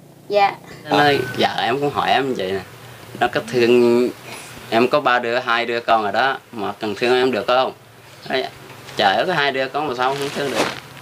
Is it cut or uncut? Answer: cut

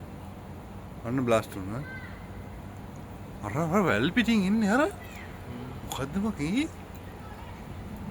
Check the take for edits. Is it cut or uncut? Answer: uncut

